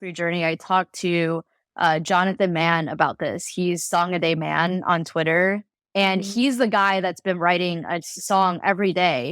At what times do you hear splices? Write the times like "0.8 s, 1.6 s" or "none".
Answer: 5.7 s